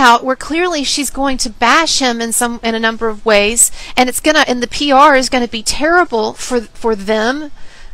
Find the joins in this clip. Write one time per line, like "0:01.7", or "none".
none